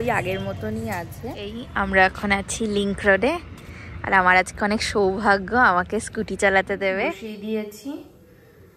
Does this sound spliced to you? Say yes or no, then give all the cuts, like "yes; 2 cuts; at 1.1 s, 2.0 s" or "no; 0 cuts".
yes; 2 cuts; at 1.4 s, 7.2 s